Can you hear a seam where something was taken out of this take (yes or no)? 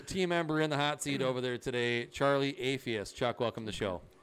no